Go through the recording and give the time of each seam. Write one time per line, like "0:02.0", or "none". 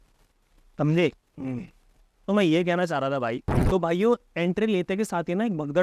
0:03.5